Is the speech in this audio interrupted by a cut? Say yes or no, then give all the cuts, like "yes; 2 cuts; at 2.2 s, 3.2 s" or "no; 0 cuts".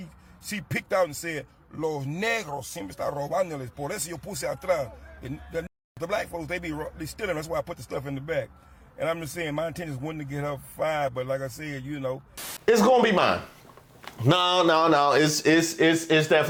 no; 0 cuts